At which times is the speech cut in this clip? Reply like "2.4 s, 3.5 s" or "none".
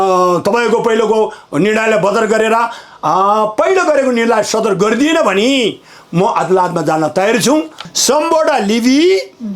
7.9 s